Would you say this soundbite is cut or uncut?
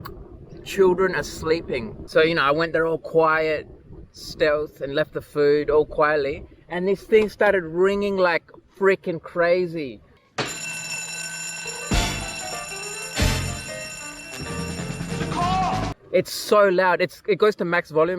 cut